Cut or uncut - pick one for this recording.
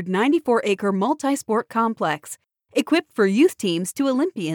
uncut